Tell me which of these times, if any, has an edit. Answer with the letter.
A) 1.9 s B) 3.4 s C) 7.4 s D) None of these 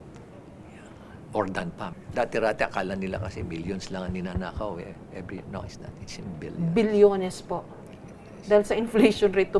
A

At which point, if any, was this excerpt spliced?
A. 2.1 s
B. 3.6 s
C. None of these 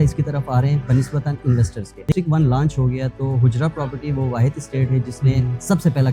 A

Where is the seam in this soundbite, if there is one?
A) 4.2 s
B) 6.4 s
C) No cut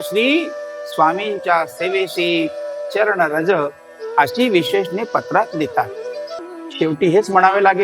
B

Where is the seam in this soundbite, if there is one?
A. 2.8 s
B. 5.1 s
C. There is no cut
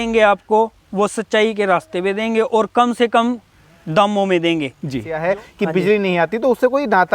B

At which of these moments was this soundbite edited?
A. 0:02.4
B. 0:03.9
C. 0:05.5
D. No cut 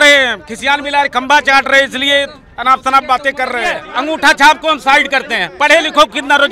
B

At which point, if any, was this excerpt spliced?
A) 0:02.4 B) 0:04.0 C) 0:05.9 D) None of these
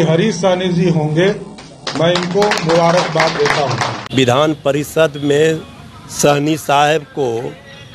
B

